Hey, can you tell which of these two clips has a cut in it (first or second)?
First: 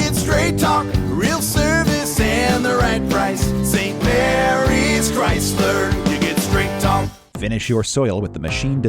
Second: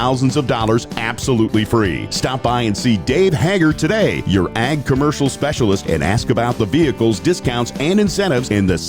first